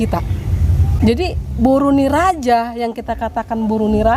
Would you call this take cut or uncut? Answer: cut